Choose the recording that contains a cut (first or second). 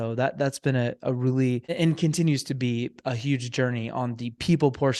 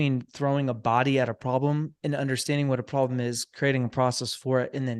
first